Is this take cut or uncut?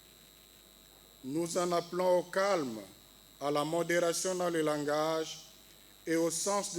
uncut